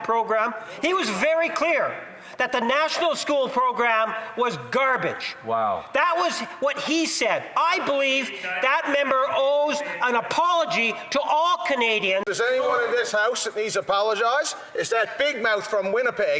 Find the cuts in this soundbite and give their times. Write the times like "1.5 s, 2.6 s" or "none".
12.3 s